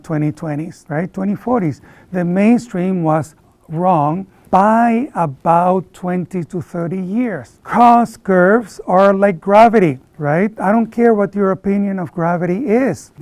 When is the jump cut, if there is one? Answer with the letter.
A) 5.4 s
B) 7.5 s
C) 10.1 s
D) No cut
B